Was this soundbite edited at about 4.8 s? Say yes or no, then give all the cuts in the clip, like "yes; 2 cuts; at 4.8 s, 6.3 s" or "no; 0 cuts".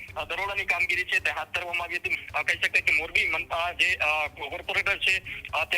no; 1 cut; at 2.1 s